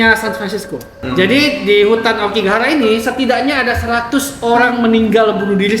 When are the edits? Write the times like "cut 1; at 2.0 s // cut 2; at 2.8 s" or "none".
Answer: cut 1; at 1.0 s